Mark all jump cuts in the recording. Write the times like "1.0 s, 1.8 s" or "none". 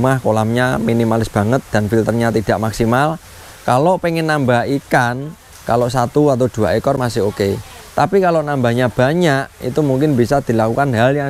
none